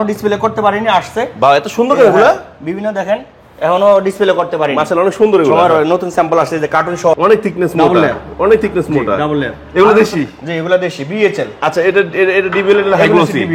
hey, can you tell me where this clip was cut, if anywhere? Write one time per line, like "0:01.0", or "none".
0:07.1